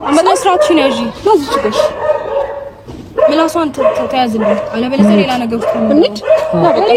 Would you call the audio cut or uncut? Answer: uncut